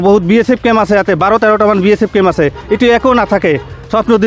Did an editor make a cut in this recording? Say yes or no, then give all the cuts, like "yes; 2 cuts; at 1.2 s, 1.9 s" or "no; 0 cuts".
no; 0 cuts